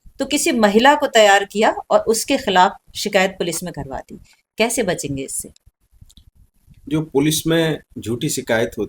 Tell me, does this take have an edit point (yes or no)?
no